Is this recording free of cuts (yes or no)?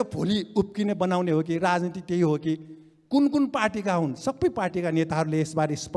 yes